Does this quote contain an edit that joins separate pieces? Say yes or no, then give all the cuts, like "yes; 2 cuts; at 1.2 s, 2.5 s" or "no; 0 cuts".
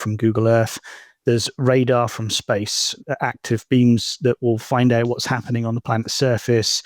yes; 1 cut; at 2.9 s